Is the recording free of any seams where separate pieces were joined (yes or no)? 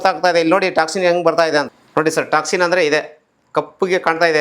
no